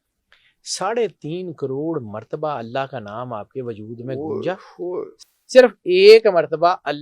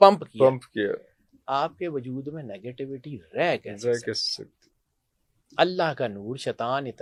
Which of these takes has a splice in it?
first; 1 cut; at 5.2 s

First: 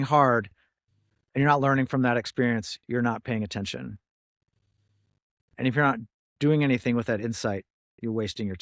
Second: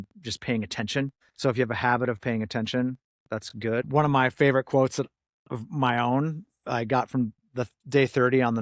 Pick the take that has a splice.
second; 2 cuts; at 1.2 s, 3.9 s

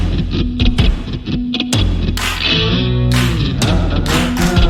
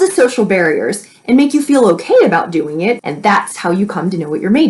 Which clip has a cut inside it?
second; 1 cut; at 3.0 s

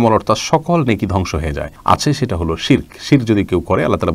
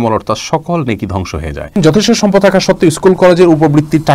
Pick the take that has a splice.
second; 1 cut; at 1.7 s

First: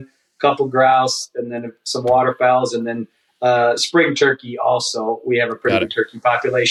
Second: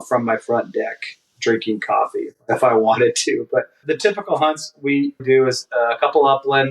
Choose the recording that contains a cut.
second; 3 cuts; at 2.4 s, 3.8 s, 5.2 s

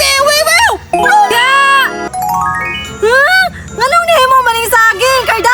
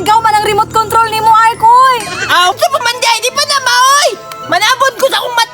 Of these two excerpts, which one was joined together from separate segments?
second; 1 cut; at 2.6 s

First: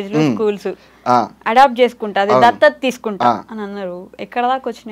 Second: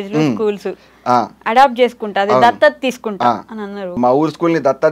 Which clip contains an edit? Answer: second; 1 cut; at 4.0 s

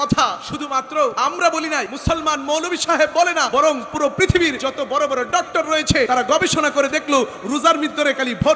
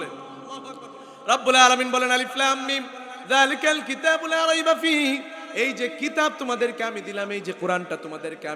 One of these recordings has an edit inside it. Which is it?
first; 5 cuts; at 0.9 s, 1.9 s, 3.5 s, 4.6 s, 6.1 s

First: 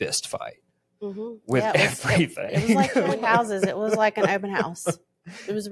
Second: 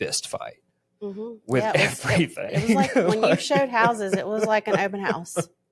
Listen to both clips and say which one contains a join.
first; 1 cut; at 3.2 s

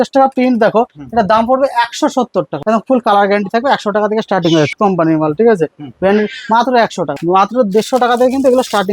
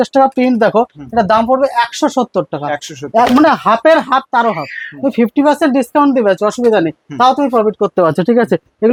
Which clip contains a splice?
first; 3 cuts; at 2.5 s, 4.7 s, 7.1 s

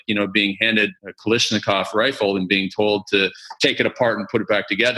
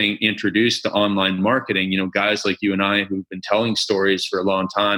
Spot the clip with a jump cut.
first; 1 cut; at 1.0 s

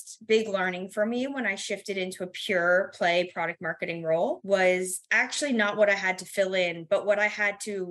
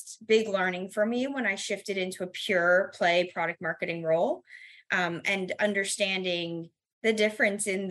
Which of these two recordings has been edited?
first; 1 cut; at 4.4 s

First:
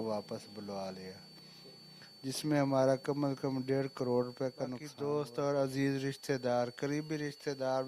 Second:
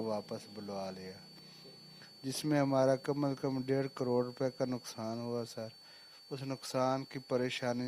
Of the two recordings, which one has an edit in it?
first; 1 cut; at 4.9 s

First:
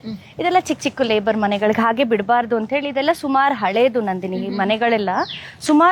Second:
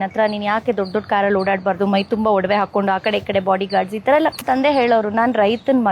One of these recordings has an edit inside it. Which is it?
second; 1 cut; at 4.4 s

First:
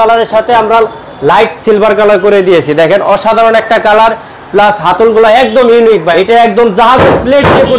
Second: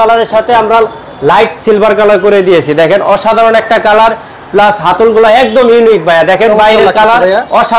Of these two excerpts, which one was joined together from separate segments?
first; 1 cut; at 6.1 s

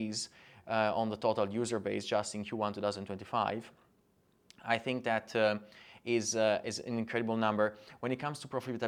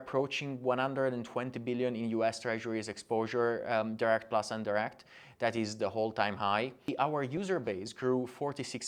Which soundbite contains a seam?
second; 1 cut; at 6.9 s

